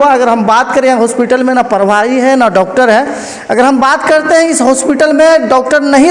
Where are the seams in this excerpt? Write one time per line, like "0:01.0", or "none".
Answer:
none